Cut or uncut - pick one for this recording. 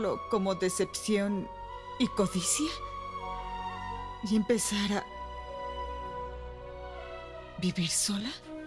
uncut